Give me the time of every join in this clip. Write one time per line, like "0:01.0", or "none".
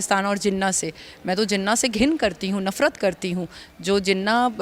none